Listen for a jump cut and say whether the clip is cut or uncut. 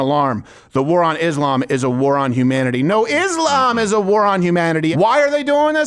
cut